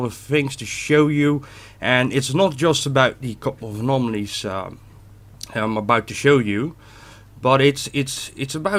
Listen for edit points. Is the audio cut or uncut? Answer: uncut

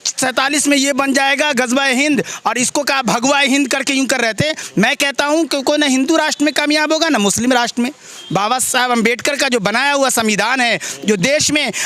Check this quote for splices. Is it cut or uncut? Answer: uncut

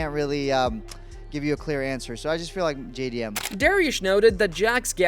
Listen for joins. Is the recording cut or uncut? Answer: uncut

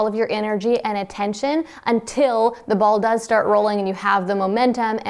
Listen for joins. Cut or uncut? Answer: uncut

